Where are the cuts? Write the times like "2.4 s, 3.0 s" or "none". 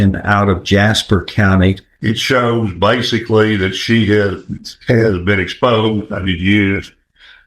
1.9 s